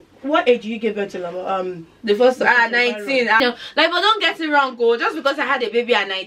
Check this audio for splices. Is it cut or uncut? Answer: cut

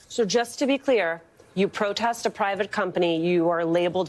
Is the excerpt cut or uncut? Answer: uncut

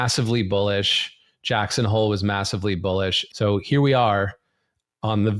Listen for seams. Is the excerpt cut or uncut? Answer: cut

